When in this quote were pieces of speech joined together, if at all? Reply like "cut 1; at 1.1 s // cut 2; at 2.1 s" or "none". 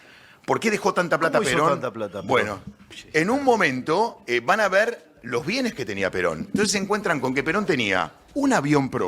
cut 1; at 2.7 s

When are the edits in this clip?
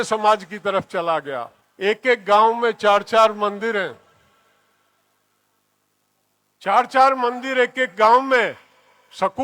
cut 1; at 1.6 s

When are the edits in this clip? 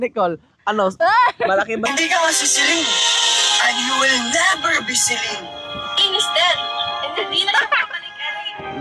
cut 1; at 1.9 s

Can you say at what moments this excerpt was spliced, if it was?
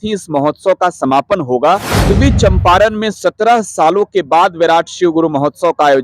cut 1; at 2.1 s

